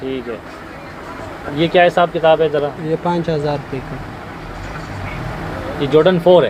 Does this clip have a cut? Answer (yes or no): no